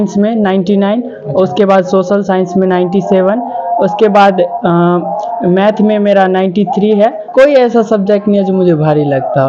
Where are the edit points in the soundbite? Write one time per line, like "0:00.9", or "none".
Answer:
0:07.2